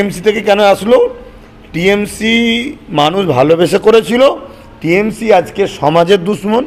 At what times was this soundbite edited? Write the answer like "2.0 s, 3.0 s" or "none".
none